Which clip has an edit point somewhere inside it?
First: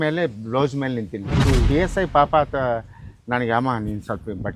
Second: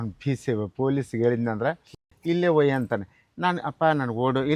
first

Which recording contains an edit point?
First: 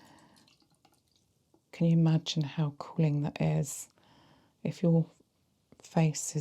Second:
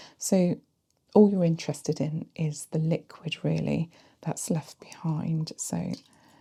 first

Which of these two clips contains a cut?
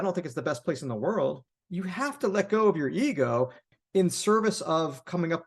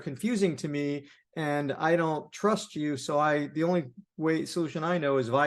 first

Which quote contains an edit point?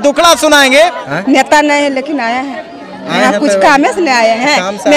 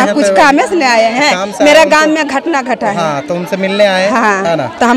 first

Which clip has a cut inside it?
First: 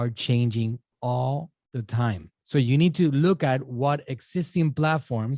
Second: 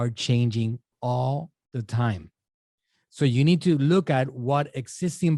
first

